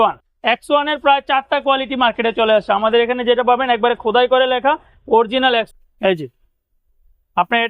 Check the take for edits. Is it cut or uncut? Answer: cut